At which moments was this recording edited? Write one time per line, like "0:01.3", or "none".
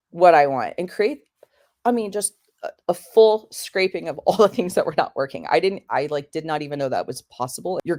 none